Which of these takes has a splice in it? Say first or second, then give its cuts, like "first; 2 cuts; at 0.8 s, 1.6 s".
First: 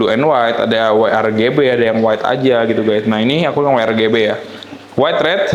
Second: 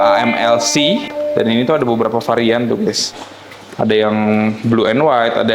second; 1 cut; at 1.2 s